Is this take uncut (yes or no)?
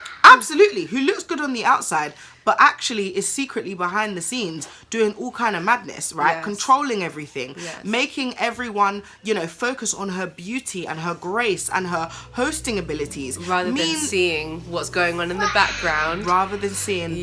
yes